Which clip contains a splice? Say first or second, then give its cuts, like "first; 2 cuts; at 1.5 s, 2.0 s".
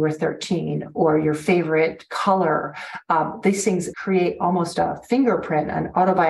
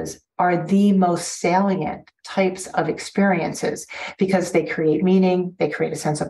first; 2 cuts; at 0.9 s, 3.9 s